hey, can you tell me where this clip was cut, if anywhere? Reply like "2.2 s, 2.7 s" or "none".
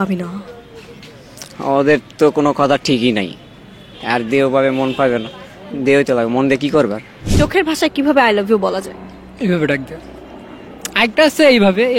3.4 s, 7.2 s